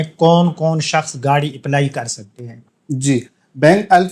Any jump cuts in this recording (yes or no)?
no